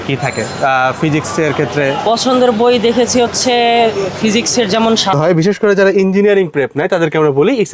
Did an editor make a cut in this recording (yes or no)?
yes